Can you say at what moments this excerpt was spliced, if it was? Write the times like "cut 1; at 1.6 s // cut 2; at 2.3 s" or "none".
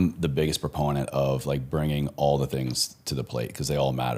none